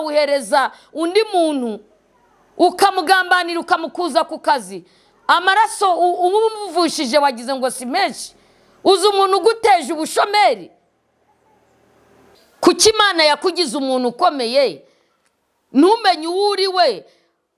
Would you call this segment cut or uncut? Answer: cut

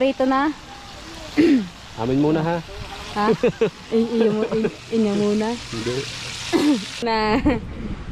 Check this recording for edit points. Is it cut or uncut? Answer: cut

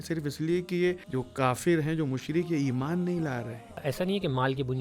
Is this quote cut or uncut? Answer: cut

